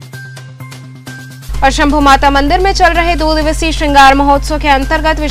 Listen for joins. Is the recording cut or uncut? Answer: cut